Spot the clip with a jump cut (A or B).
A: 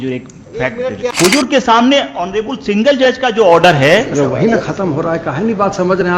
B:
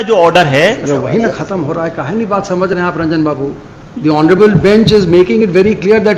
A